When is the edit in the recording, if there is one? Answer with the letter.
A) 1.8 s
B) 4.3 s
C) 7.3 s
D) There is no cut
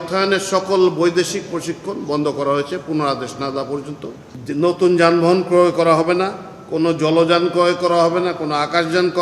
B